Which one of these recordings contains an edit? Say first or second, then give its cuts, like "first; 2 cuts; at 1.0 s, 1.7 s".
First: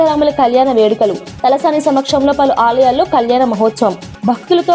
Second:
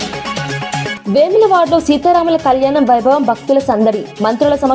second; 1 cut; at 0.9 s